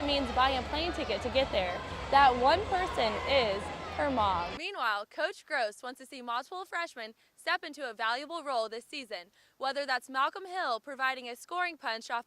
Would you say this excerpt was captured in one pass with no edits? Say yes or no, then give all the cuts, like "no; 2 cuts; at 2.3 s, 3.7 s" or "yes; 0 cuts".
no; 1 cut; at 4.5 s